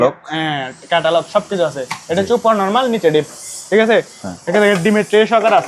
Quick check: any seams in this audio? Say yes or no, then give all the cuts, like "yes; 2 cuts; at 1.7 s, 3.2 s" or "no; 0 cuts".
no; 0 cuts